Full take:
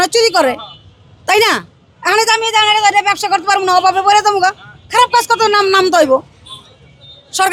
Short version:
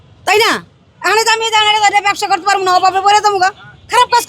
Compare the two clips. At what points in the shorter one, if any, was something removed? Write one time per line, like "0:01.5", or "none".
none